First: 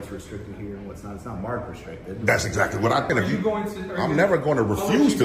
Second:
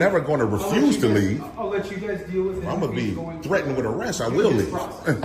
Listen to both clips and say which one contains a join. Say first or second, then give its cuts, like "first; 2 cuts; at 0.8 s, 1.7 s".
first; 1 cut; at 3.1 s